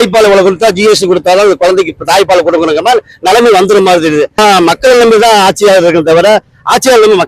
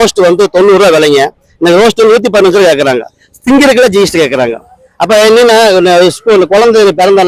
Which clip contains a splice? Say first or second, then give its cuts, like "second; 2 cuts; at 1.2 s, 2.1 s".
first; 1 cut; at 4.3 s